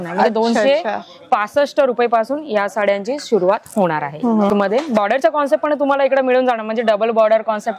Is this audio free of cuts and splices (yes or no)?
no